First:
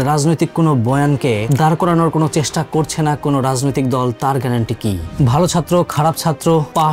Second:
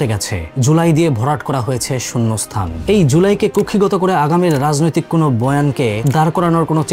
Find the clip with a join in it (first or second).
first